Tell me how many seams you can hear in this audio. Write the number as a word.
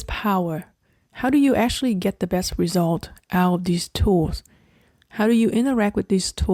zero